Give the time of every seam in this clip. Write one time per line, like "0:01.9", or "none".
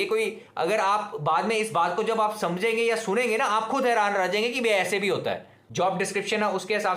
0:05.6